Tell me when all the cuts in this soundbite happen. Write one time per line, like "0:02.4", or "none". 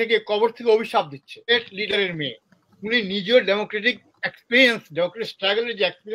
0:01.5

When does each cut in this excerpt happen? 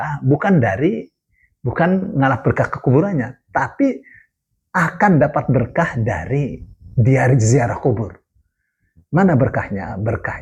none

